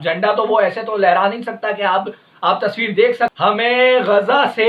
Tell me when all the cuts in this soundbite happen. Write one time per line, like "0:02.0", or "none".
0:03.3